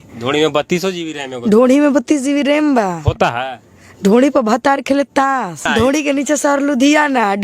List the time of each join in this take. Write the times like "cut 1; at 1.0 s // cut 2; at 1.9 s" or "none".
cut 1; at 5.6 s